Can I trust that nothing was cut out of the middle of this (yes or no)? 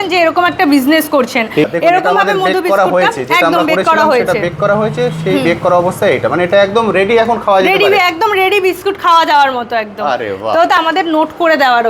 no